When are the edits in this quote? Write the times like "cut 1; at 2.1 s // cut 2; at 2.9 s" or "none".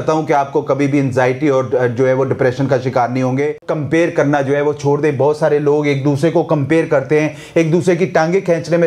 cut 1; at 3.7 s